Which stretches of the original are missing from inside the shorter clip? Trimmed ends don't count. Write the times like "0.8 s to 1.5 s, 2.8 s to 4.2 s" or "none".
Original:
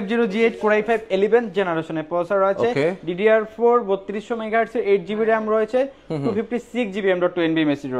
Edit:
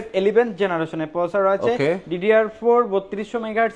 none

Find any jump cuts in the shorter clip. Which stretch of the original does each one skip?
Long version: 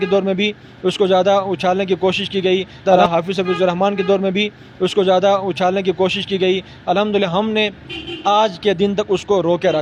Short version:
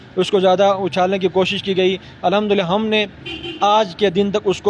2.7 s to 6.7 s

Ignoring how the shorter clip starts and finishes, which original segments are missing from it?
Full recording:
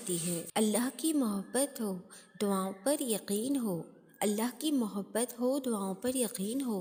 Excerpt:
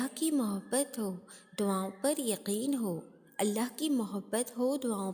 none

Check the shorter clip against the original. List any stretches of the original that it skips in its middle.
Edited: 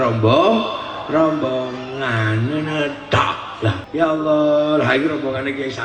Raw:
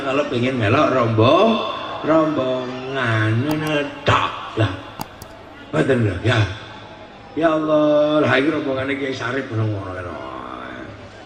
4.8 s to 7.2 s

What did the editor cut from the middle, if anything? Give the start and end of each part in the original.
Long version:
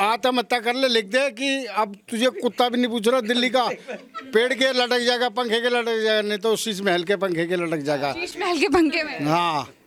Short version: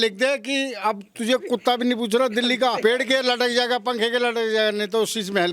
3.7 s to 4.3 s

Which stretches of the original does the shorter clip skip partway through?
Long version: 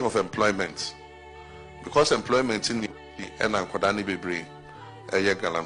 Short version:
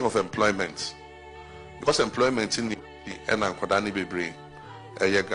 1.9 s to 2.0 s

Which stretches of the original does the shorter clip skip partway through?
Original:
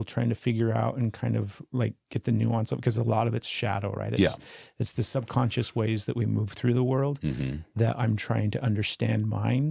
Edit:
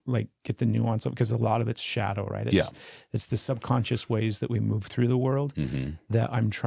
none

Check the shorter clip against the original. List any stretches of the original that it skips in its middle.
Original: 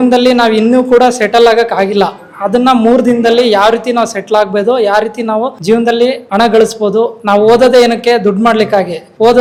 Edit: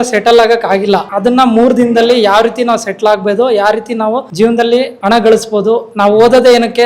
2.2 s to 2.4 s

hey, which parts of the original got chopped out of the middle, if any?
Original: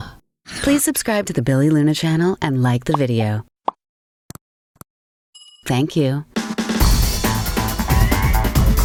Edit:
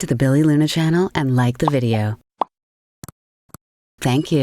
4.6 s to 5.0 s

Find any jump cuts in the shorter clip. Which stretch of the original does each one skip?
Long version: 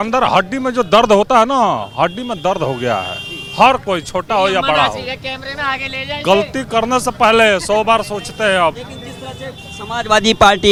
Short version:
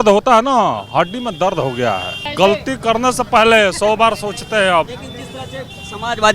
3.2 s to 6.1 s

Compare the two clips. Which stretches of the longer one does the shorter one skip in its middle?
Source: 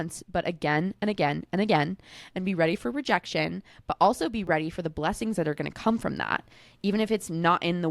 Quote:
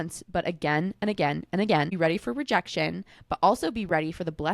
1.9 s to 2.5 s

